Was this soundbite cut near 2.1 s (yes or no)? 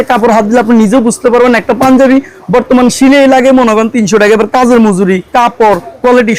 no